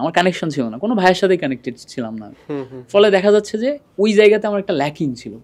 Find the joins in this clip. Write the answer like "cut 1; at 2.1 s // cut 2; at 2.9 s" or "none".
none